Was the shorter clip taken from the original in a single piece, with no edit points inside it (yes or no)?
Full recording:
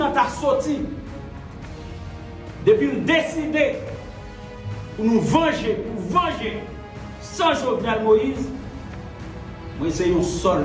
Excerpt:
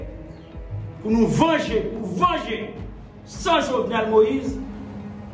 yes